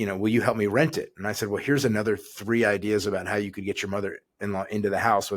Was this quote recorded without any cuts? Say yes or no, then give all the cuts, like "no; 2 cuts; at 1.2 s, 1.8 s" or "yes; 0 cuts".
yes; 0 cuts